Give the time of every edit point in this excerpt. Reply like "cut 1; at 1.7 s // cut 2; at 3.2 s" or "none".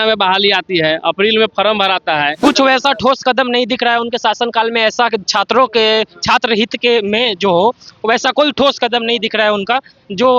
cut 1; at 2.3 s